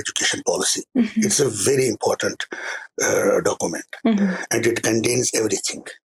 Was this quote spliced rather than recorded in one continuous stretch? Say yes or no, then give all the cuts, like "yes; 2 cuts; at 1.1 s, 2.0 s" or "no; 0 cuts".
no; 0 cuts